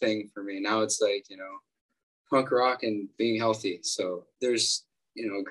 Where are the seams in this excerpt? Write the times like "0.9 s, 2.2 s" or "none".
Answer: 4.3 s

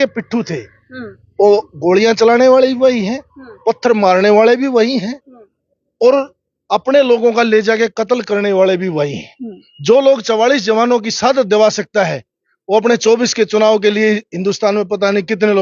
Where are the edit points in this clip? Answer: none

